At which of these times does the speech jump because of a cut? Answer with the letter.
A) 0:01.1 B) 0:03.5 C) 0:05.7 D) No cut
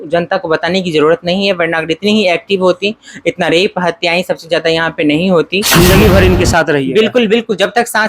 C